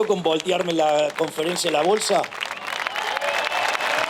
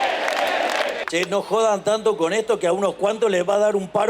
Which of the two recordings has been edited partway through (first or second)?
second